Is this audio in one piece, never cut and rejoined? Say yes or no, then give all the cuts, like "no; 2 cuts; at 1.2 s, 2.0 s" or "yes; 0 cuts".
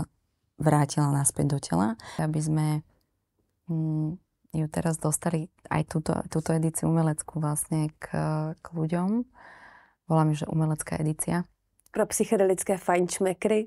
no; 1 cut; at 2.1 s